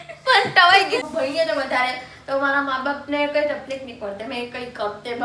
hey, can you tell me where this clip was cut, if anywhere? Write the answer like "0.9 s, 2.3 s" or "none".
1.1 s